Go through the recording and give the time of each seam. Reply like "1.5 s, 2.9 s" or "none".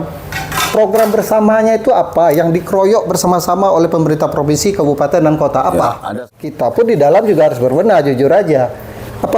6.7 s